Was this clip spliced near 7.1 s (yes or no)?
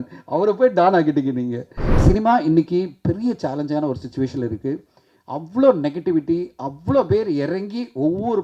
no